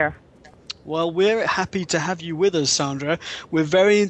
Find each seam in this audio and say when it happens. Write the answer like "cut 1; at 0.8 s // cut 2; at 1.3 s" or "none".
none